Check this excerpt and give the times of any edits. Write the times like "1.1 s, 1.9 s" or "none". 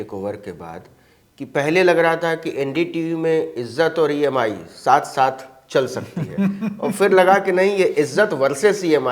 none